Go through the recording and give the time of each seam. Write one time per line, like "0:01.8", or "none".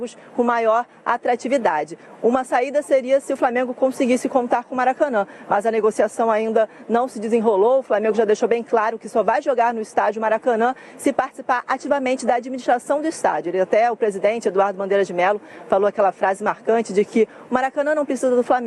none

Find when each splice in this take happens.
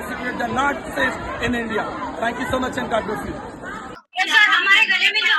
0:04.0

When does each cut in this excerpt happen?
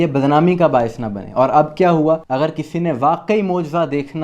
0:02.3

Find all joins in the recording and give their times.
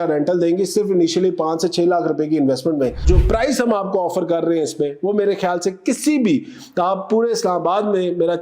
0:03.0

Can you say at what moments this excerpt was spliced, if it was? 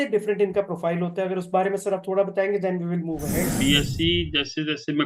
0:03.6

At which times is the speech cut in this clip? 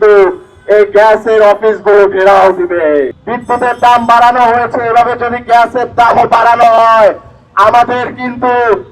0:03.2

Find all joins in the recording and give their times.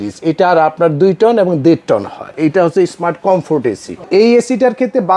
0:02.3
0:04.1

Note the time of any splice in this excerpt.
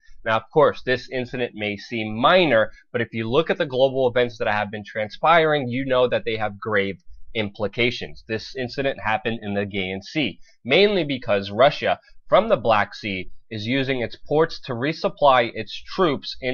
0:13.0

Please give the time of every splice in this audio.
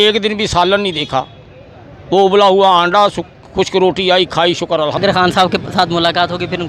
0:05.0

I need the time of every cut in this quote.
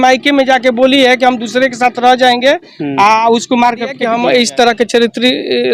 0:04.0

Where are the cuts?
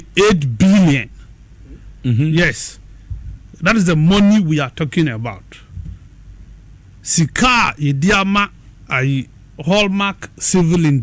0:05.0

